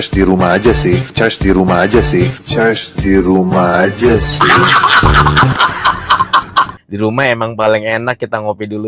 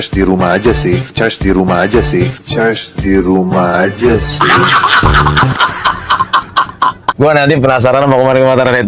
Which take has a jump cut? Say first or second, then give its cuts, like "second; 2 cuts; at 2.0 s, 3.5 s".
first; 1 cut; at 6.7 s